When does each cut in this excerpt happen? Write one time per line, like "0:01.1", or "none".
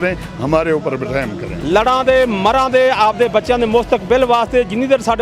0:01.5